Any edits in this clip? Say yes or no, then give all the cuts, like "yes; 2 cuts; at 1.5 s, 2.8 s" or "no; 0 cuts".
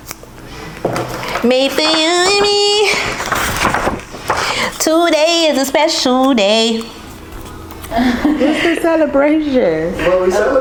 no; 0 cuts